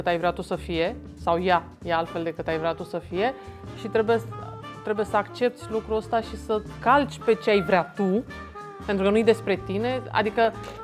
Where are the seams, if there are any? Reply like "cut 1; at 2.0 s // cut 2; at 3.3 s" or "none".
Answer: none